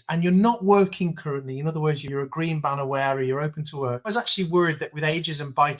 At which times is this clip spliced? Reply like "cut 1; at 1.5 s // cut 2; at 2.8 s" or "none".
cut 1; at 2.1 s // cut 2; at 4.1 s